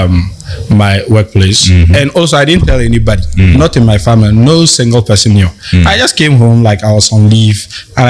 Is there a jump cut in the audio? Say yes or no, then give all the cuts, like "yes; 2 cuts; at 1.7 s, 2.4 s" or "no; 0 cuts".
no; 0 cuts